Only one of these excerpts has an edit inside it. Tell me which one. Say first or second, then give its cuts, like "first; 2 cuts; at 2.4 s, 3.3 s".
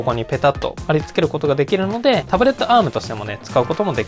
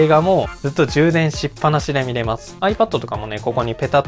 second; 1 cut; at 2.5 s